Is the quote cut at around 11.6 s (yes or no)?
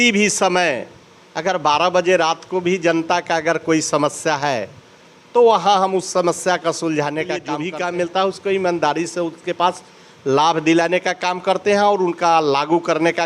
no